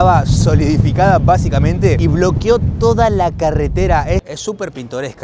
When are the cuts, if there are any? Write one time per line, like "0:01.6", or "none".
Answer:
0:04.3

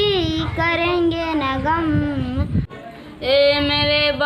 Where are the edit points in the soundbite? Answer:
0:02.7

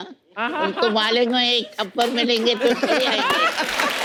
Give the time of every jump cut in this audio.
none

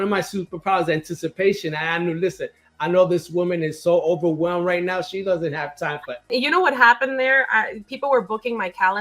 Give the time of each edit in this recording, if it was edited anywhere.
0:06.3

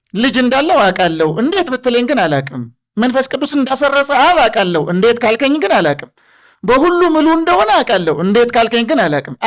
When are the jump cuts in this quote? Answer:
none

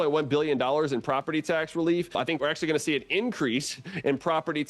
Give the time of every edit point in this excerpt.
0:02.4

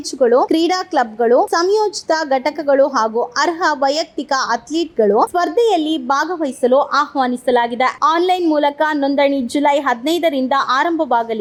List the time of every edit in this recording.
none

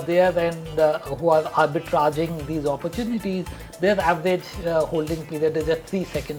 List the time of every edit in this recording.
none

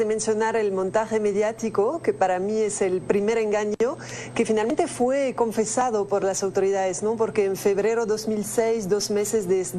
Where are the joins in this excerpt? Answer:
none

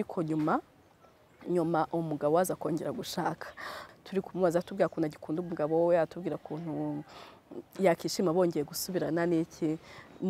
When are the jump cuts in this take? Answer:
0:03.8

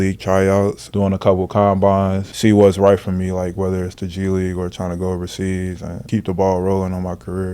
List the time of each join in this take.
0:00.8
0:02.3
0:05.9

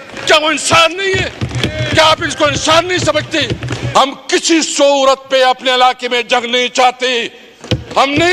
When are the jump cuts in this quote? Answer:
0:03.7

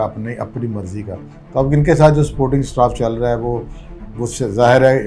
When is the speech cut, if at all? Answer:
none

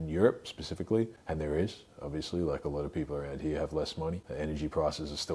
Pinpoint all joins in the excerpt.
0:01.2
0:04.2

